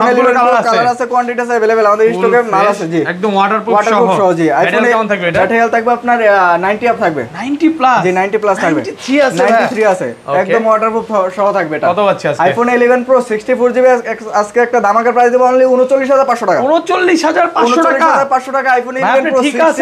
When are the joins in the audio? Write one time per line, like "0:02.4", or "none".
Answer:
none